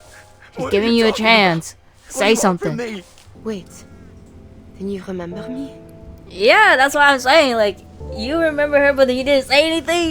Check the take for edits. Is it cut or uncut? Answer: cut